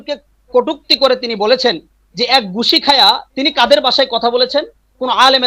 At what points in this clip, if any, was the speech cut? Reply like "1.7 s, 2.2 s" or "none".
none